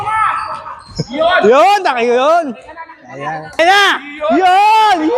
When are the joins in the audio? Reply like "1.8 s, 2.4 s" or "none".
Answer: 3.6 s